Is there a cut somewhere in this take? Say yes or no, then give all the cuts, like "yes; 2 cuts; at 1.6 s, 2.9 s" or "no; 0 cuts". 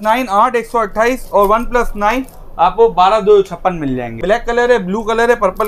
yes; 1 cut; at 4.2 s